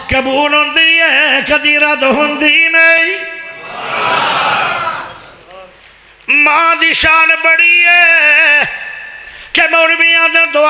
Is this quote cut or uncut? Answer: uncut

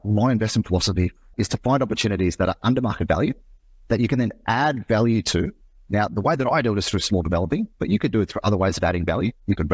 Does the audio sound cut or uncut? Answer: cut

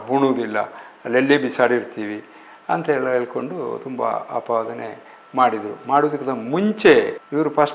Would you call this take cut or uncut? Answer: uncut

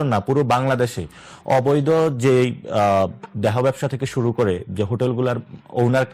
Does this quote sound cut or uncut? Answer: uncut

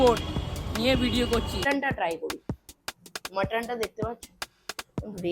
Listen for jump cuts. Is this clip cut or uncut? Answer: cut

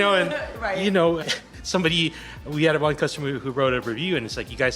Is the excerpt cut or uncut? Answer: cut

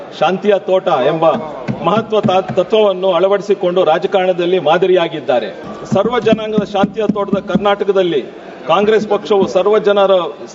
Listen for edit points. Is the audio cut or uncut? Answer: cut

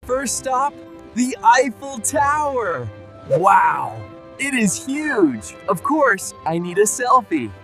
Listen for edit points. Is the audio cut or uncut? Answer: uncut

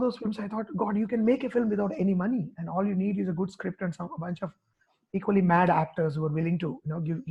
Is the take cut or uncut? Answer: uncut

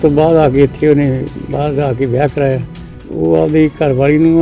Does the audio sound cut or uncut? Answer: cut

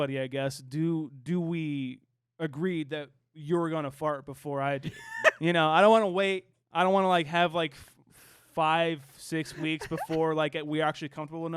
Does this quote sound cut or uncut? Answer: cut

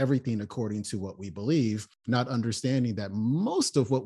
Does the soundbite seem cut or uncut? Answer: uncut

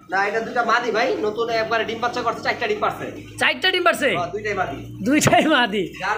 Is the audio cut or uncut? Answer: uncut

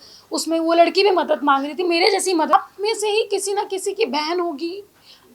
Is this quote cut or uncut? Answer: cut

